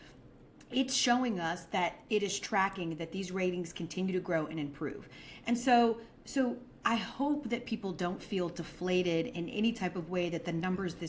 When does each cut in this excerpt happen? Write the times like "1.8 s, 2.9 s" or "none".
none

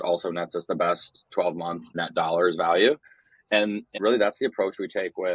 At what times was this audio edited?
1.9 s, 3.9 s

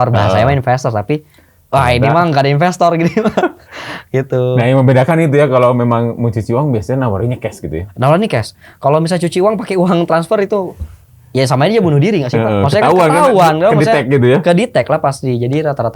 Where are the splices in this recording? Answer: none

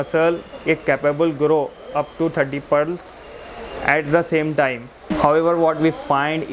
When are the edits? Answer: none

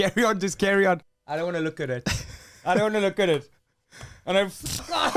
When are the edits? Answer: 1.1 s

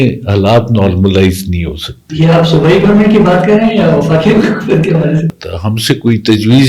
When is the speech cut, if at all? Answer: 5.3 s

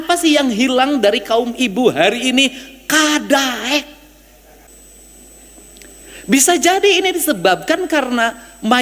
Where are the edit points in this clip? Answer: 4.7 s

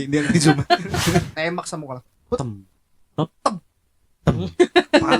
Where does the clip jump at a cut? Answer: 1.3 s

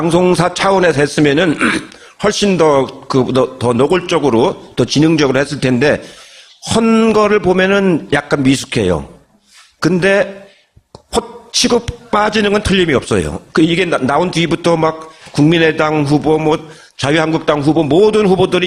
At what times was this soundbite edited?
none

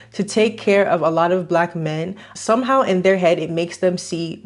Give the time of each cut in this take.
2.3 s

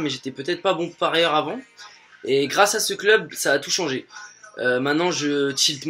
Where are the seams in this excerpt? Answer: none

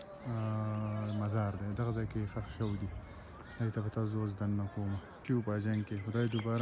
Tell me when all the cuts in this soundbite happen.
none

